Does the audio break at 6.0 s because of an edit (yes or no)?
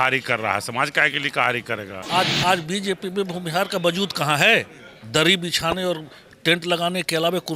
no